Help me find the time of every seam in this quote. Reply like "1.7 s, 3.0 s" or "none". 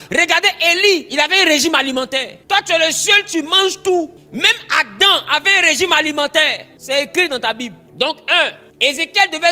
2.3 s, 4.2 s, 6.7 s, 7.8 s, 8.6 s

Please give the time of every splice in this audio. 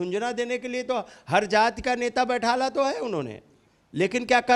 none

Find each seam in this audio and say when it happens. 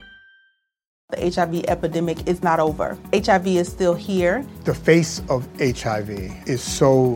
1.0 s

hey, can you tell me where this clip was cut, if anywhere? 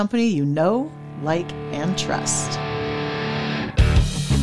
2.2 s

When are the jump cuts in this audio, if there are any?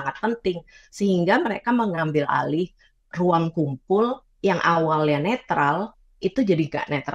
none

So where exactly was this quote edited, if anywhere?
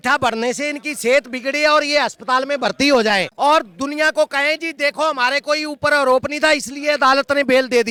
none

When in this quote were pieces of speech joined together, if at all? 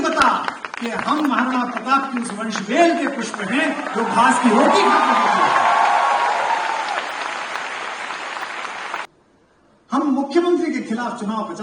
9.1 s

